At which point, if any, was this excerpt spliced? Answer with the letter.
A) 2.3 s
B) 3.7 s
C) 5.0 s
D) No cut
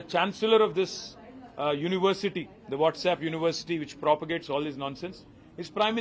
D